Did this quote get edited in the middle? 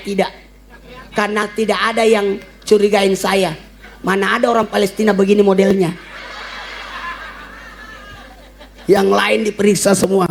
no; 0 cuts

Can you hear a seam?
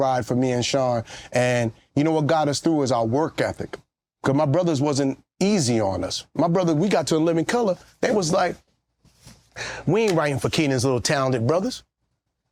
no; 0 cuts

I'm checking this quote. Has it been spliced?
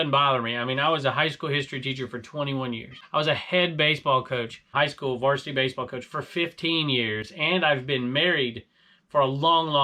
yes; 2 cuts; at 2.9 s, 4.7 s

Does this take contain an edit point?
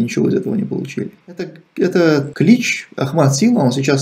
yes; 1 cut; at 1.6 s

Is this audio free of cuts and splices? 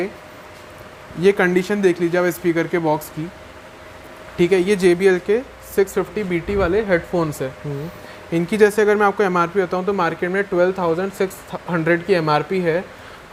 yes; 0 cuts

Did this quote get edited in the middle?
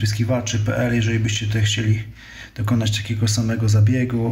no; 0 cuts

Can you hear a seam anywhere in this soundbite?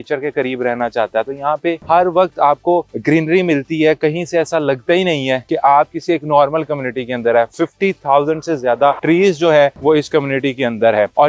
no; 0 cuts

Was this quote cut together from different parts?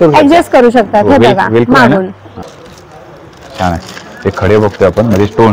yes; 1 cut; at 2.4 s

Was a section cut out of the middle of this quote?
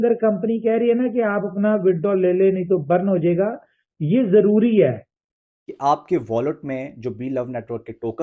no; 0 cuts

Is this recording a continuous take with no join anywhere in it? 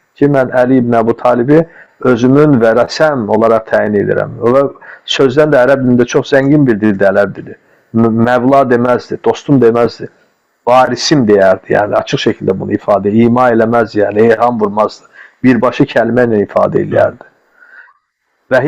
yes; 0 cuts

